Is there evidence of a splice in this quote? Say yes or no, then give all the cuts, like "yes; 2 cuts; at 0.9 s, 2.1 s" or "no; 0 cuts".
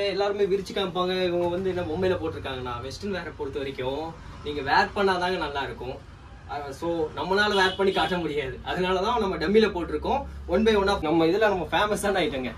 yes; 1 cut; at 11.0 s